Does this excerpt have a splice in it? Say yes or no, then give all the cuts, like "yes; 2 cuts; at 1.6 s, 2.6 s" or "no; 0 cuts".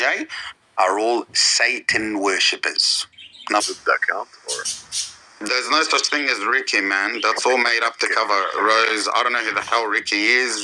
yes; 1 cut; at 3.6 s